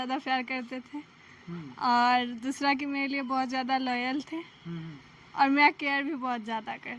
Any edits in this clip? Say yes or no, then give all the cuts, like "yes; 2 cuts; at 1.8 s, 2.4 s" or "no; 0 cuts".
no; 0 cuts